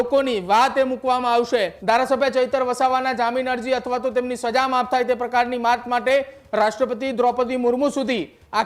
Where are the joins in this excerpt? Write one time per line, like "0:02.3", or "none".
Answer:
0:01.7